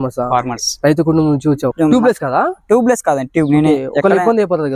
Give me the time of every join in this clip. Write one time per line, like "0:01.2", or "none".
0:01.7

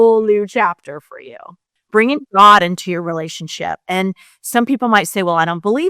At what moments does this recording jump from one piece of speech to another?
0:01.5

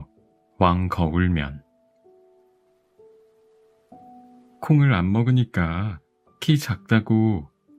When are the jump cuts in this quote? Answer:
0:01.8
0:04.5

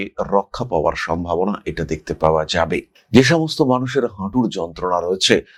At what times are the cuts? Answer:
none

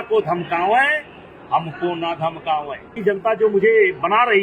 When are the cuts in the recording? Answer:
0:02.9

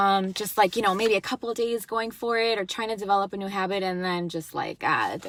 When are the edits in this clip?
none

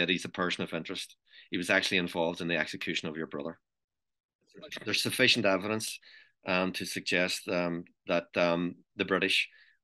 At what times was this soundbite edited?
0:04.7

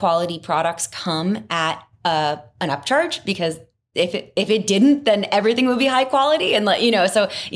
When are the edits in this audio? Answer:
none

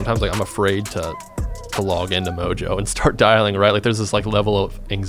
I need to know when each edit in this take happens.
none

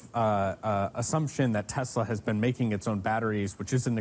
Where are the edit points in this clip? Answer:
none

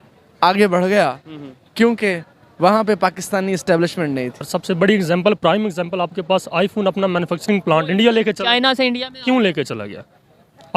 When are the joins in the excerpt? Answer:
0:04.4

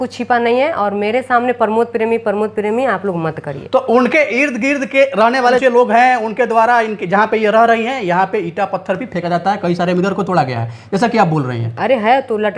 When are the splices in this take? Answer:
none

